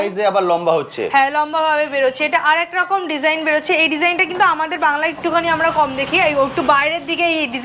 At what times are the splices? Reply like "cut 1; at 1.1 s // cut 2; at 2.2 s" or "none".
none